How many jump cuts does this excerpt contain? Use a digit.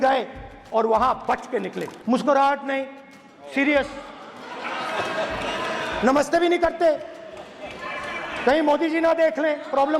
1